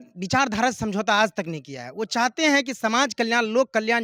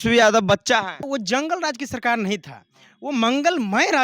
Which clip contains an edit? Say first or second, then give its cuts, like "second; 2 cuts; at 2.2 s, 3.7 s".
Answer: second; 1 cut; at 1.1 s